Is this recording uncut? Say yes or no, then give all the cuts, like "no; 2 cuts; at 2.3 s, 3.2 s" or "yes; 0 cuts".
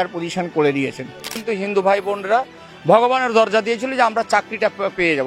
no; 1 cut; at 1.3 s